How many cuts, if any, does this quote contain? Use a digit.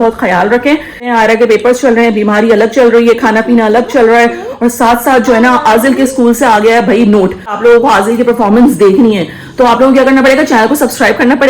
2